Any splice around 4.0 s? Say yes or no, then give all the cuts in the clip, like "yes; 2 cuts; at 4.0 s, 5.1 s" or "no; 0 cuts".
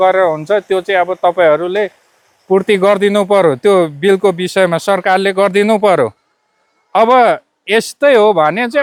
no; 0 cuts